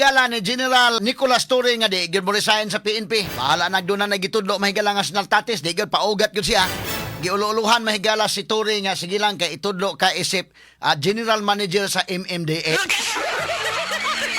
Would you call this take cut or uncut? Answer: cut